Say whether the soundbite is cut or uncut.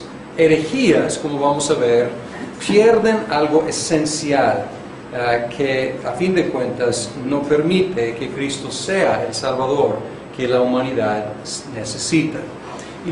uncut